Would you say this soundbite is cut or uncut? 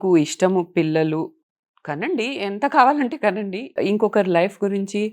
cut